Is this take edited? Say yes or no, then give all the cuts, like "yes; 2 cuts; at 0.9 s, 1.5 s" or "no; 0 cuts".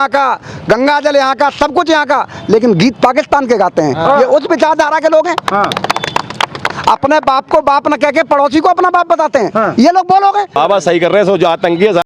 yes; 1 cut; at 10.6 s